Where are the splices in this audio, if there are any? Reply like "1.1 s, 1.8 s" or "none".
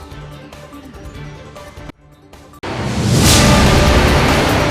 1.2 s

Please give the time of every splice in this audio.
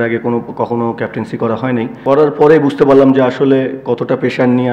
2.0 s

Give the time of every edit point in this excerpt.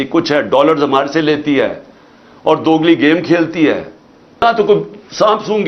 4.4 s

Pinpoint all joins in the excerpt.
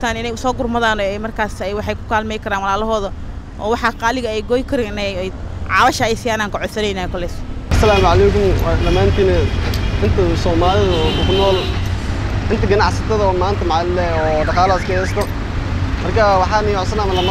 none

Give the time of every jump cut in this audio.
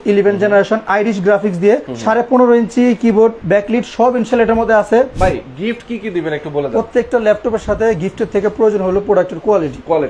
1.9 s, 3.4 s, 5.1 s

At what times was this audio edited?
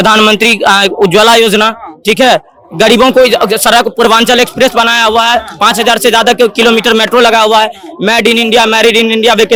none

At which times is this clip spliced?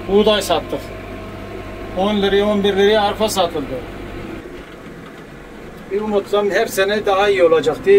4.4 s

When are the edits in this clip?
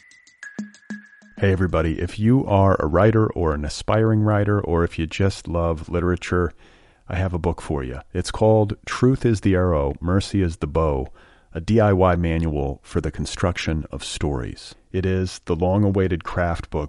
0.9 s

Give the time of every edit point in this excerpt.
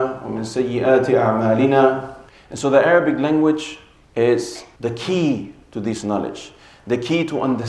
2.2 s

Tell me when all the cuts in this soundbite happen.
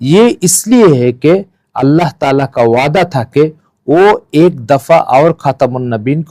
none

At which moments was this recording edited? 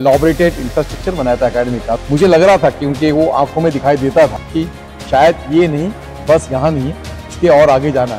2.0 s, 4.6 s

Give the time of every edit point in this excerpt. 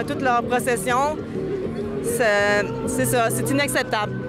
none

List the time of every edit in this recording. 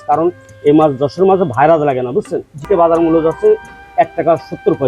2.6 s

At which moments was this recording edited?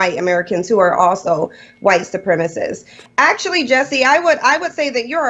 1.2 s

